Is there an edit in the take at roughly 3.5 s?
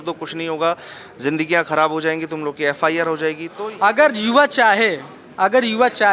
yes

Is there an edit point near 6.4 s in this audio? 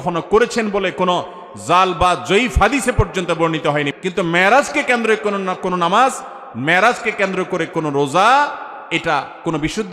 no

